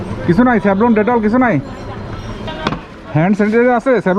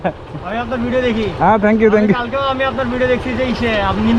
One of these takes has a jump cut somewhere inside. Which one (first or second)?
first